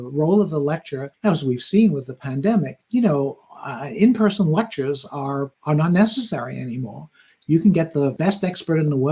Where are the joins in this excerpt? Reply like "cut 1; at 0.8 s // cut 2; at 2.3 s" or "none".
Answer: cut 1; at 8.2 s